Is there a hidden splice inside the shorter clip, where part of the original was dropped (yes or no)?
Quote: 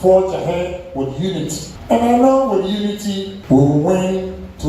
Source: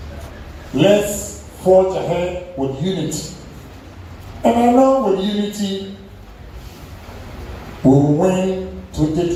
yes